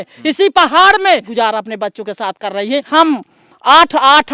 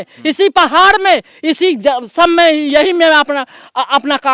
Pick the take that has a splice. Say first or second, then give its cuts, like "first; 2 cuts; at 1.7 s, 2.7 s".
first; 2 cuts; at 1.3 s, 2.9 s